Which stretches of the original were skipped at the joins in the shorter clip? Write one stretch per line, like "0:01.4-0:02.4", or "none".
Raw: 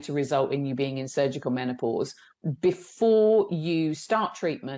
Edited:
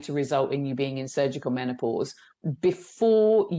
none